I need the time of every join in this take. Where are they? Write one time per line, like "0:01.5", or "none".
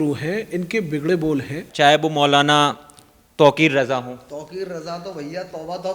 0:01.6